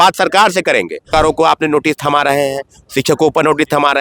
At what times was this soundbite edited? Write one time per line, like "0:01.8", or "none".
0:01.1